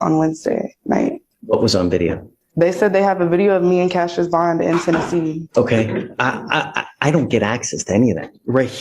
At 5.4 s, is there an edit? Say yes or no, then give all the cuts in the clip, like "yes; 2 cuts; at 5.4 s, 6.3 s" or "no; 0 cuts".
yes; 2 cuts; at 1.3 s, 5.4 s